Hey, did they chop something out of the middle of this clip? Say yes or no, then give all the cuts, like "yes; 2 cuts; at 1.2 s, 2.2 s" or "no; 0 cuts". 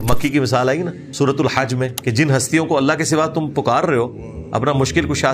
yes; 2 cuts; at 1.0 s, 2.0 s